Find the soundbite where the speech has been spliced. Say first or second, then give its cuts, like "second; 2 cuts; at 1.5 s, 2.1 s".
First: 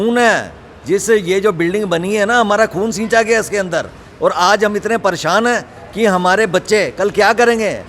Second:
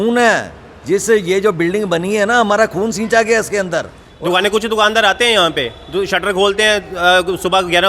second; 1 cut; at 4.0 s